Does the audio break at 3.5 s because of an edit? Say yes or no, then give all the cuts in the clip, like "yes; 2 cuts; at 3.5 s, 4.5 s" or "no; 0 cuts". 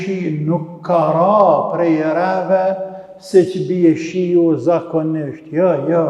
no; 0 cuts